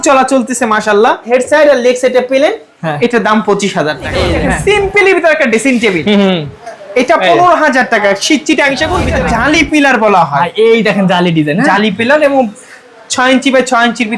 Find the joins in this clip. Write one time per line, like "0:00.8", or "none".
0:01.3
0:04.3
0:09.2